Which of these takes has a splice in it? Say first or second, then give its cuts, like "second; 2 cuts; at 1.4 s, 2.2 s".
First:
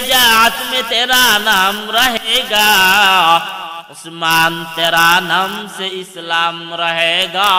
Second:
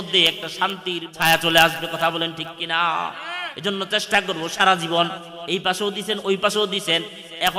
second; 1 cut; at 1.0 s